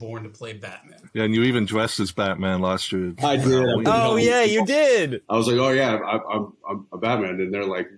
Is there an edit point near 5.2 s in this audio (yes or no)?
yes